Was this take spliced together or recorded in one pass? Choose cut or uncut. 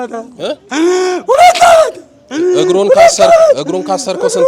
uncut